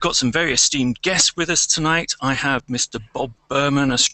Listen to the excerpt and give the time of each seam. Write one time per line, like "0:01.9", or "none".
0:02.9